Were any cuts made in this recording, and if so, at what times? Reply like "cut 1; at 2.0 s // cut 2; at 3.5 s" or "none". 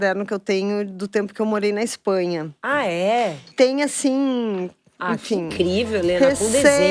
cut 1; at 3.5 s